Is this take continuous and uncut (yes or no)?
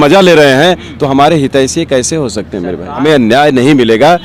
no